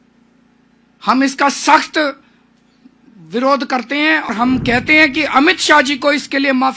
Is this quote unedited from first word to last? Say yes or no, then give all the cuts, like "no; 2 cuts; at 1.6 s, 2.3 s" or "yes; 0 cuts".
no; 1 cut; at 4.3 s